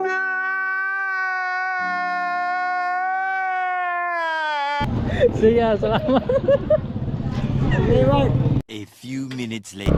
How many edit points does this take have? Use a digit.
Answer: 0